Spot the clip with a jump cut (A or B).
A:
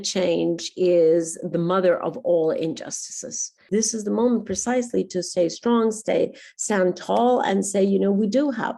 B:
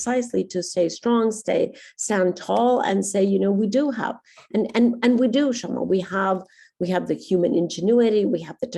A